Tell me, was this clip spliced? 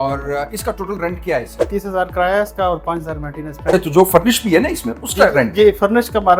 yes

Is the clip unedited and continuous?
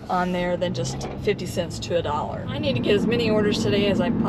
no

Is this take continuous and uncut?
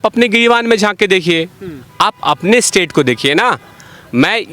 yes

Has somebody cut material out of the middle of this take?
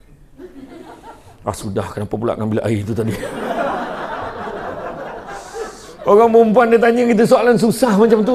no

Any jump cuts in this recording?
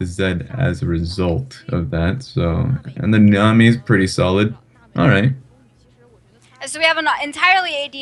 no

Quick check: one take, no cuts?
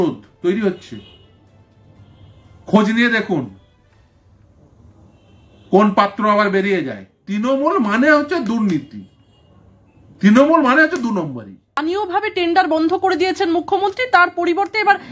no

